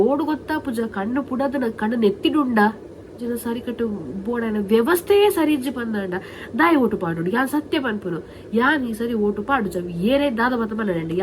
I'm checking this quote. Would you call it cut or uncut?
cut